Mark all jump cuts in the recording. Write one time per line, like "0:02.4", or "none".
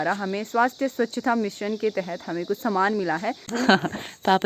0:03.5